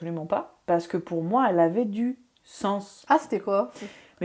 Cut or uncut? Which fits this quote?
uncut